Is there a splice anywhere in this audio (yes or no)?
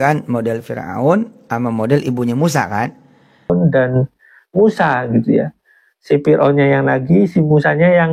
yes